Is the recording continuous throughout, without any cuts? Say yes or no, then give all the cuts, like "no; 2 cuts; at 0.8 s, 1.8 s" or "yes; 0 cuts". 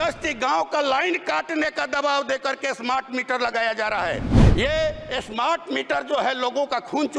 no; 1 cut; at 4.3 s